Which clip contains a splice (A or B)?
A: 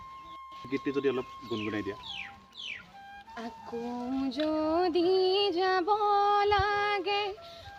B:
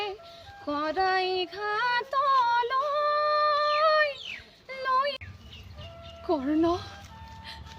B